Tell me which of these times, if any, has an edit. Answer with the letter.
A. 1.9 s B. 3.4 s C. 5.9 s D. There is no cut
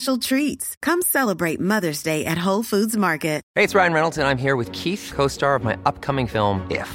B